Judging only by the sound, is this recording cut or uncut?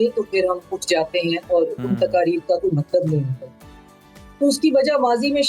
uncut